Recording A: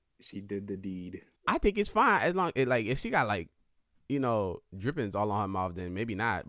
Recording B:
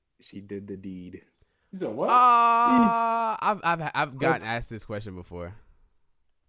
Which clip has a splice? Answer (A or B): A